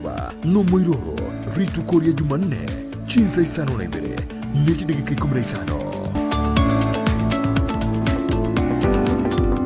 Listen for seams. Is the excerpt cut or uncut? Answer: cut